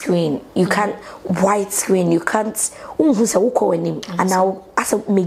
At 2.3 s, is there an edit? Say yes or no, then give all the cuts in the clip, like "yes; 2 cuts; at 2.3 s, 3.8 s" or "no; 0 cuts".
no; 1 cut; at 4.0 s